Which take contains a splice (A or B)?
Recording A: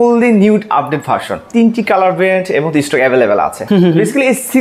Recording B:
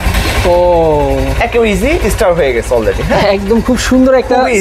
A